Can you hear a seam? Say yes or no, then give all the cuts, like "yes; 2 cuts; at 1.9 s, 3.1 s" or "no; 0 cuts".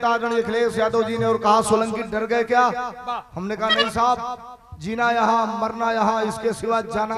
no; 0 cuts